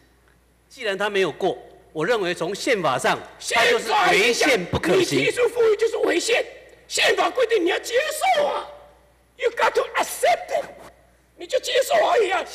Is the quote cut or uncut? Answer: uncut